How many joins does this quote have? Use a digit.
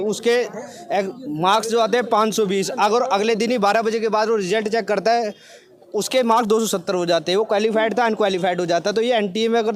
0